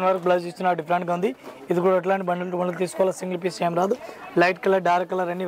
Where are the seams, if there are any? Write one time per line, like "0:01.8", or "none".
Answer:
none